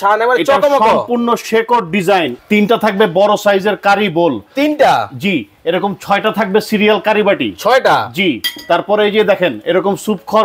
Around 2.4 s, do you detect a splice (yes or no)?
yes